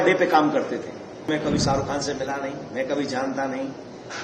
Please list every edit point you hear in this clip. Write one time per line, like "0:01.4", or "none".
0:01.3